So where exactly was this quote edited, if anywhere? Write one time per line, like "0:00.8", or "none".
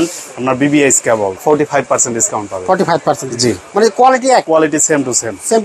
0:01.4
0:04.4